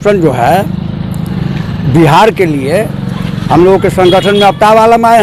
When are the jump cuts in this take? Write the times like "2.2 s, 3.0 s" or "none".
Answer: none